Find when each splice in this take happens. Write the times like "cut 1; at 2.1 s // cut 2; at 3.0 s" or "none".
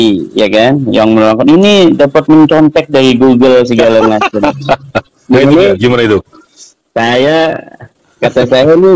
none